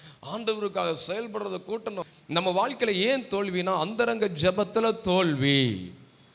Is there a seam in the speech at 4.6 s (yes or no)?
no